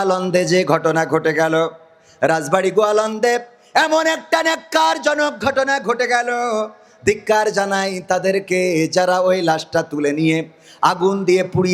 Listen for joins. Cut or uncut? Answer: uncut